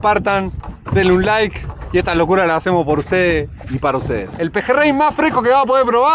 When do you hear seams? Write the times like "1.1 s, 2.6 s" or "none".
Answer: 4.3 s

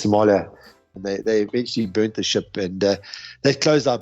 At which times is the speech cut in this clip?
0.9 s

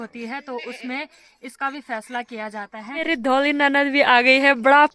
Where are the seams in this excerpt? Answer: 3.0 s

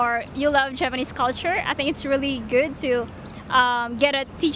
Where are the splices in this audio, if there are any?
none

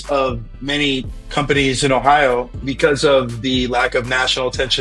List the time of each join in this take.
2.6 s

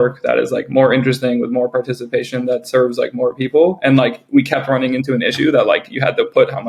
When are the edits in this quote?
none

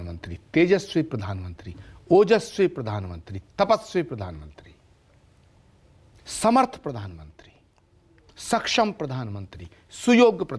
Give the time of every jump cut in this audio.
none

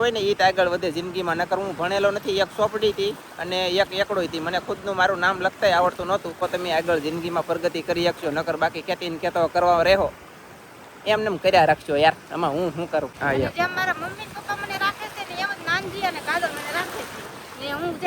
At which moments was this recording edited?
6.4 s, 13.1 s

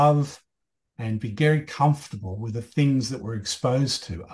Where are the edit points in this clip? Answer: none

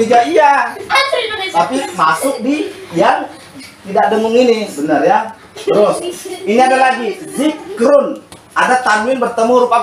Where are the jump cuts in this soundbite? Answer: none

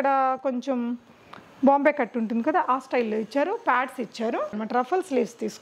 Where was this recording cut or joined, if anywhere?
4.6 s

